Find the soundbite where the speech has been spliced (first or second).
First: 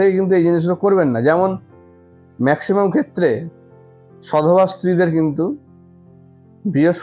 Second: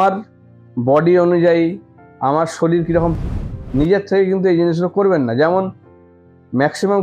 second